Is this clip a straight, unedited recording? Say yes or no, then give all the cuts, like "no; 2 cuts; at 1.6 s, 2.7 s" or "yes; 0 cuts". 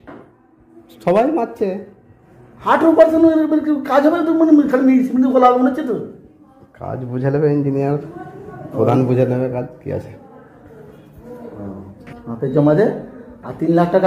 no; 1 cut; at 11.7 s